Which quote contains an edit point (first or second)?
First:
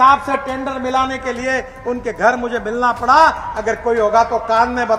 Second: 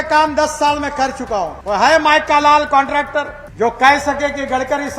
second